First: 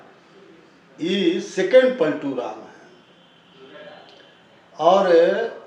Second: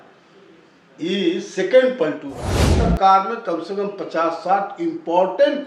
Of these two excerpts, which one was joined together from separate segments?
second; 1 cut; at 2.8 s

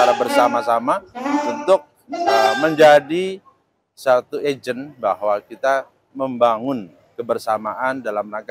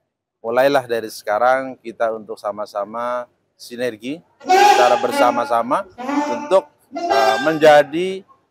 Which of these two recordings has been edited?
first; 1 cut; at 6.0 s

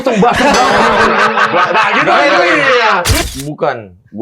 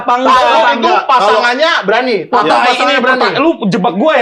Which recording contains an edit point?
first; 1 cut; at 3.2 s

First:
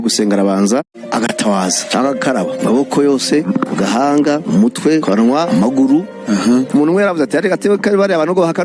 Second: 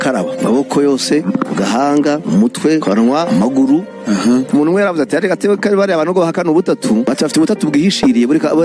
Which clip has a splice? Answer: first; 1 cut; at 1.0 s

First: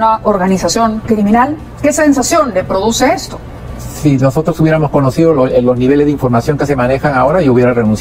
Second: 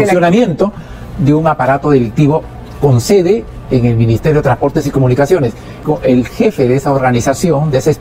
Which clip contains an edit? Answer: second; 1 cut; at 5.8 s

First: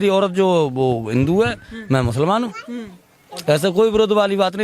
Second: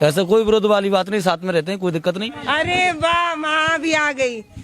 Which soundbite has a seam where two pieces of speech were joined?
second; 1 cut; at 2.3 s

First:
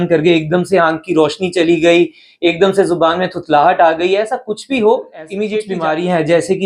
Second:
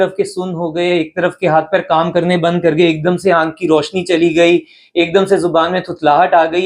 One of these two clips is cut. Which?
first; 1 cut; at 5.6 s

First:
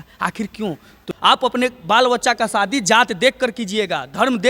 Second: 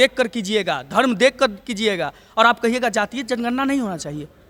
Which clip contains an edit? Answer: first; 1 cut; at 1.0 s

